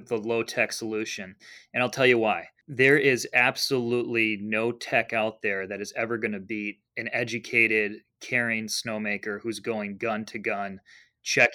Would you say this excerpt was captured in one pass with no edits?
no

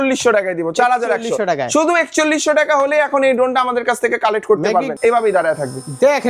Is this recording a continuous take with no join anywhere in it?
no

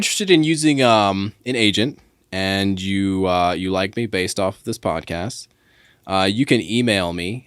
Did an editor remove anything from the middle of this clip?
no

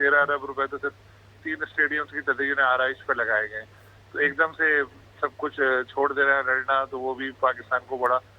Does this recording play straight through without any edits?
yes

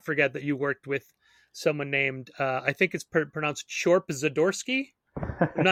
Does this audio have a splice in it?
no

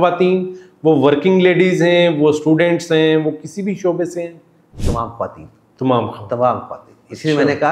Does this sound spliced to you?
no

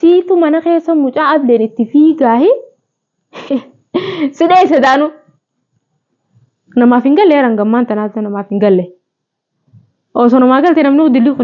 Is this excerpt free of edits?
yes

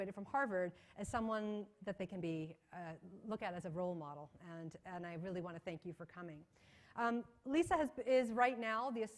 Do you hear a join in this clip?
no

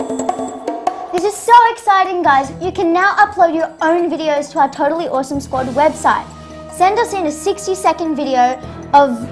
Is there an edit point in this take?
yes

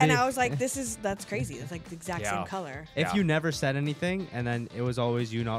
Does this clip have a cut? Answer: yes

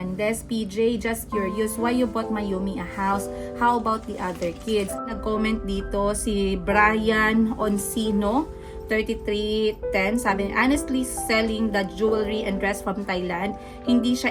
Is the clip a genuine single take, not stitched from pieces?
no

